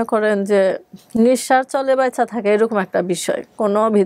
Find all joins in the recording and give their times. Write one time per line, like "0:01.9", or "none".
none